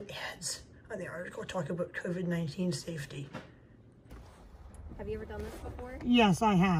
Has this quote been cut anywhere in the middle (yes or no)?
yes